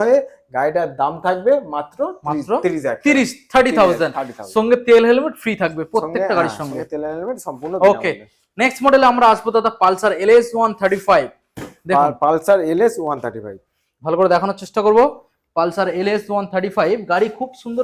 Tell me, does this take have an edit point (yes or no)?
no